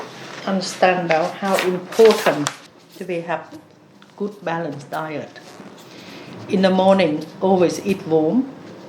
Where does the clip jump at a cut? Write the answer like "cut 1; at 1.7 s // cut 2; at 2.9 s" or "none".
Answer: cut 1; at 2.6 s